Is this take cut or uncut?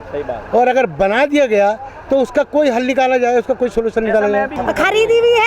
cut